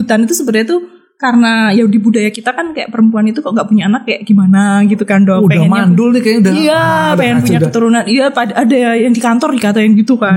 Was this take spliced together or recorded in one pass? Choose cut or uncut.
uncut